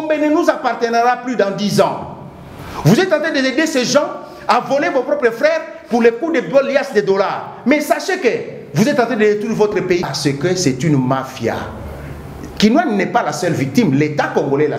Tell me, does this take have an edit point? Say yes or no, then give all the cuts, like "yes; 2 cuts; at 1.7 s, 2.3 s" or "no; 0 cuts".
yes; 1 cut; at 10.1 s